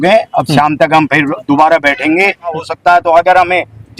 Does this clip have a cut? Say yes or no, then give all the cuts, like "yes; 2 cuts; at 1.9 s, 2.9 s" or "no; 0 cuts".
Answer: yes; 1 cut; at 2.5 s